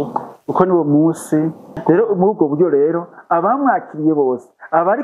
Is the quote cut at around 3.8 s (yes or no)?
no